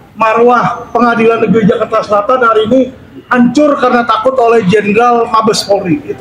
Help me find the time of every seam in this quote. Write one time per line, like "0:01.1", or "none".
none